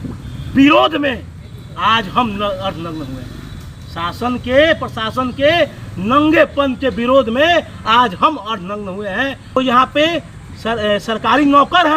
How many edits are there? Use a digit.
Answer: 1